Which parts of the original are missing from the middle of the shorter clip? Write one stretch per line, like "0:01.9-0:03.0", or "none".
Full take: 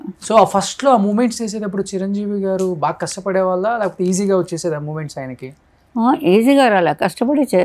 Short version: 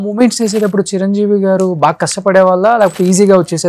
none